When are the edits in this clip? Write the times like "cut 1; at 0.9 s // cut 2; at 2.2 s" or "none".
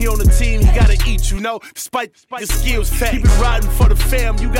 none

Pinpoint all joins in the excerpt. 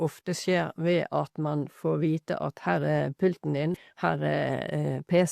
cut 1; at 3.9 s

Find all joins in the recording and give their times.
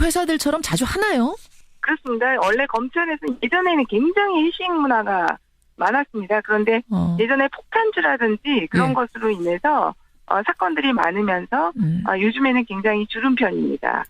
cut 1; at 12.5 s

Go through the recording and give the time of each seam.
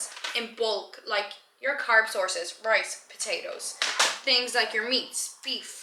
none

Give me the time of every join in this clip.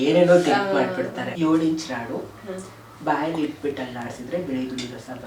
cut 1; at 1.2 s

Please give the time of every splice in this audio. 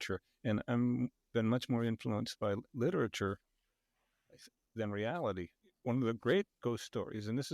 cut 1; at 5.6 s

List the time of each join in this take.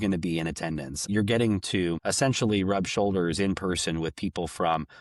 cut 1; at 1.1 s // cut 2; at 2.0 s

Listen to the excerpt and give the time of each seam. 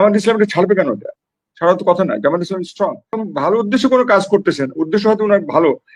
cut 1; at 3.2 s

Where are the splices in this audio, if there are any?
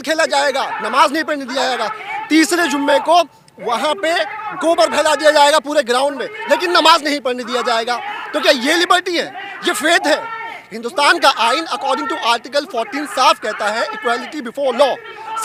none

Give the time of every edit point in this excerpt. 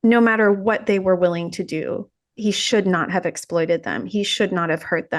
cut 1; at 2.3 s

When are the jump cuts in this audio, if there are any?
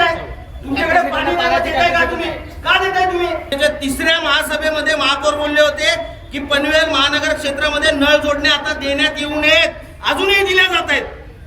cut 1; at 3.5 s

